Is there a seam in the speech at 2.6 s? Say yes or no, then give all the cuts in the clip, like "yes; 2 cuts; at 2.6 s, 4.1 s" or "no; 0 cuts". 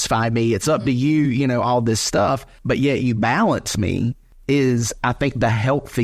yes; 2 cuts; at 2.6 s, 4.3 s